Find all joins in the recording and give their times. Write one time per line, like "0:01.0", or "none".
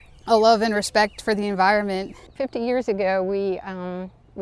0:02.2